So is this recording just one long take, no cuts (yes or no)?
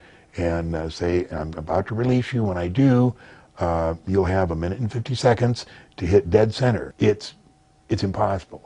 no